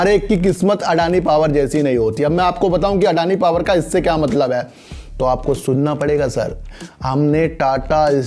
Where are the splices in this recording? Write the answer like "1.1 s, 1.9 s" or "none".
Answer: none